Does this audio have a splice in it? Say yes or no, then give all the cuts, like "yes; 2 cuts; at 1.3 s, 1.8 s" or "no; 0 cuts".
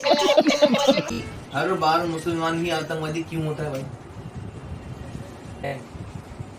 yes; 2 cuts; at 1.1 s, 5.7 s